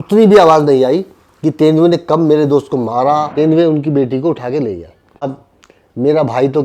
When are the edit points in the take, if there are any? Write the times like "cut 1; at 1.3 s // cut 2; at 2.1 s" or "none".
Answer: cut 1; at 3.3 s // cut 2; at 5.2 s